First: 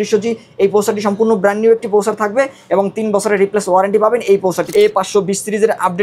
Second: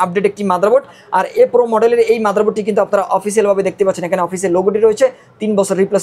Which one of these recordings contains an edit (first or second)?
first